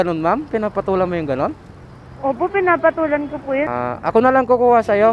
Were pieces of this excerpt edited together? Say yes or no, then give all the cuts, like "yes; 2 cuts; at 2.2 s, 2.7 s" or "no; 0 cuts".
yes; 1 cut; at 3.8 s